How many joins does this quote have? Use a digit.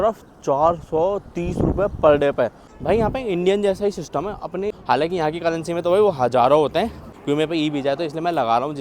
3